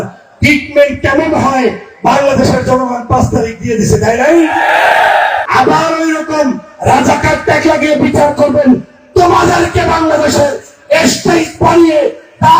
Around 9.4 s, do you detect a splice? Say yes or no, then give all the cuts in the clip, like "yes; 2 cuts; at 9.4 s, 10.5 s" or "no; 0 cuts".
no; 1 cut; at 5.4 s